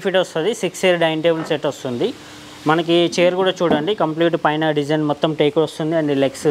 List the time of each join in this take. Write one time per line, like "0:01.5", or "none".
none